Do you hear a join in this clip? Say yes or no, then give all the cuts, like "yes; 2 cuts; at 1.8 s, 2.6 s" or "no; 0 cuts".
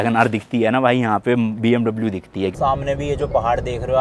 yes; 1 cut; at 2.5 s